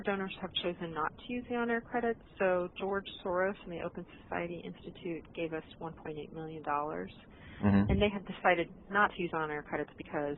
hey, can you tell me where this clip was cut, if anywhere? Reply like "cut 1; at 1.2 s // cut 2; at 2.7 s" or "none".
none